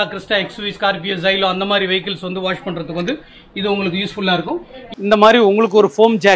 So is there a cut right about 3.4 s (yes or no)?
no